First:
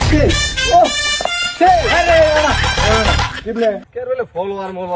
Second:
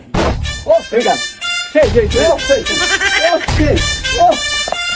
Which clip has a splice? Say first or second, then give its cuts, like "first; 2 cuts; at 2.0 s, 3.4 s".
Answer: first; 1 cut; at 3.9 s